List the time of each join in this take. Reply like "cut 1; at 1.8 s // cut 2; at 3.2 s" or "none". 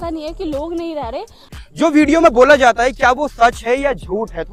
cut 1; at 1.6 s